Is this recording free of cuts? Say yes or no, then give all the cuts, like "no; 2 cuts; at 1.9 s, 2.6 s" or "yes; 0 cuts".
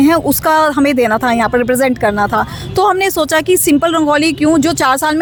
yes; 0 cuts